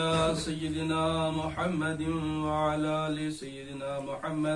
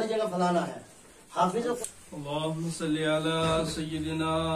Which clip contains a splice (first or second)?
second